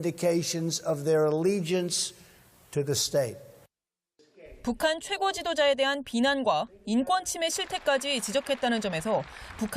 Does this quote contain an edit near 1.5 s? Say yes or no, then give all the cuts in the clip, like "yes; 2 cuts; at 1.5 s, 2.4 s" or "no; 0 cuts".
no; 1 cut; at 6.3 s